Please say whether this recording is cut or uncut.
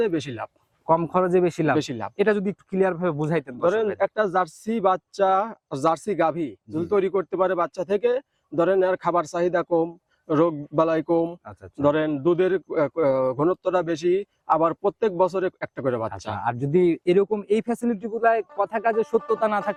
uncut